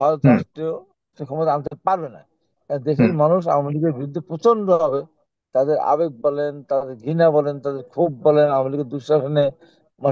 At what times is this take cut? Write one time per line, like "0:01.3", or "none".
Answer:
0:01.2